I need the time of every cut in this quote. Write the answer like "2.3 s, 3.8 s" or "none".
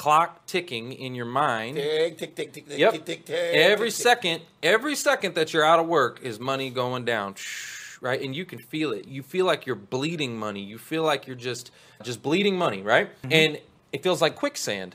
none